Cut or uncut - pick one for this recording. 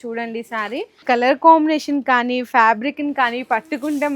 cut